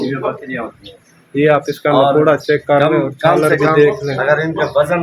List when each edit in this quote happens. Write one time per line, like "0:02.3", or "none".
none